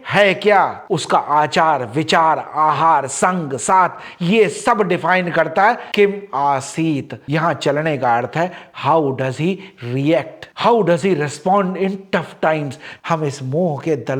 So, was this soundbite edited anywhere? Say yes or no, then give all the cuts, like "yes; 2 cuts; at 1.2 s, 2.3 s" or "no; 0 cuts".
yes; 2 cuts; at 7.2 s, 12.9 s